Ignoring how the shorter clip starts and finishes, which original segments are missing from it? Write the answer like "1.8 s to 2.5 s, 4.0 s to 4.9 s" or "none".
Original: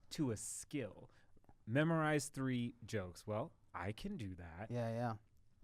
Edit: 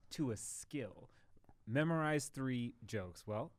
none